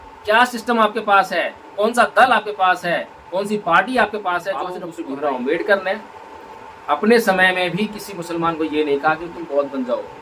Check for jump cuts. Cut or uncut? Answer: cut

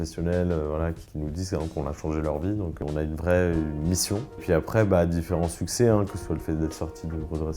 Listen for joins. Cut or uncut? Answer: cut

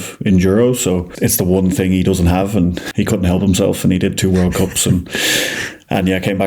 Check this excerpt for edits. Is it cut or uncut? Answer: cut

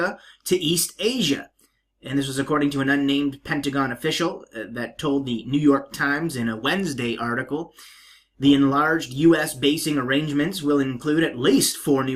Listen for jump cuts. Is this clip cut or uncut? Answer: uncut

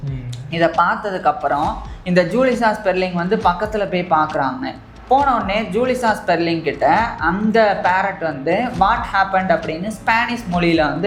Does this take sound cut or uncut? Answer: uncut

